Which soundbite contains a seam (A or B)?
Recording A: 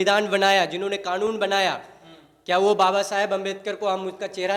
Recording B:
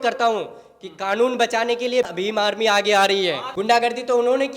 B